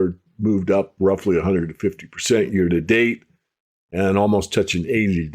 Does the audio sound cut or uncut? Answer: uncut